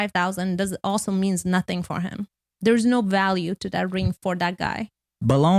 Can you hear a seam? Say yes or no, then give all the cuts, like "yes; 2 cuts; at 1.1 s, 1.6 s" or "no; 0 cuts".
no; 0 cuts